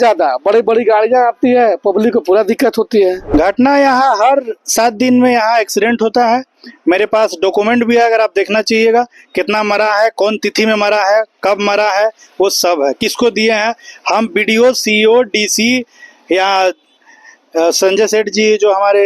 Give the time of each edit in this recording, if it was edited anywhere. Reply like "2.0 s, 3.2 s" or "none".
3.2 s